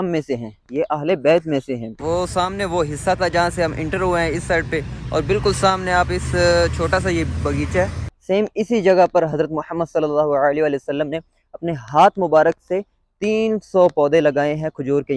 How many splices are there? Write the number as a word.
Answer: two